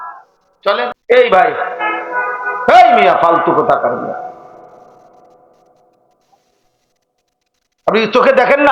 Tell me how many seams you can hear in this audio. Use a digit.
1